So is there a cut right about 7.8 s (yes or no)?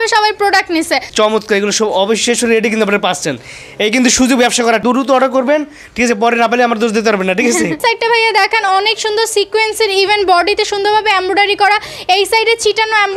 yes